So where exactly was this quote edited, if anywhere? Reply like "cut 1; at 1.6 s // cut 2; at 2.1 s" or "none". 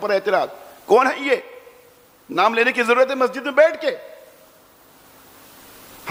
none